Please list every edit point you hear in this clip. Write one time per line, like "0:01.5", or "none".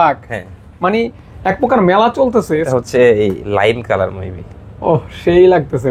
0:02.7

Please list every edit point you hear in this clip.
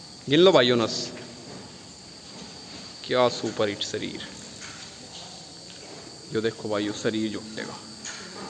none

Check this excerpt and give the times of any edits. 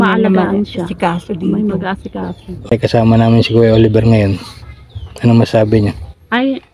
0:02.7

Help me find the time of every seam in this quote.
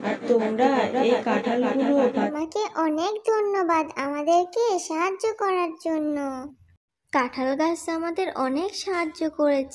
0:02.3

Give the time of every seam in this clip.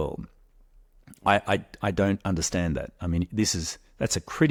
none

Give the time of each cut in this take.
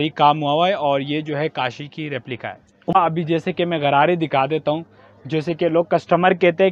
0:02.9

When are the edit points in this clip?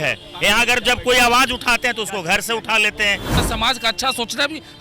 0:03.4

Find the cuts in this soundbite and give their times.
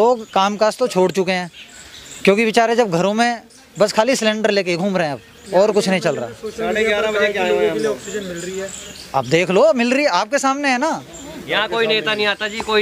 none

